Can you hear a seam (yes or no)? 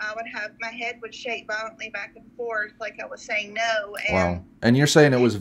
no